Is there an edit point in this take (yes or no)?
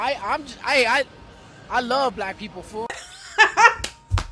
yes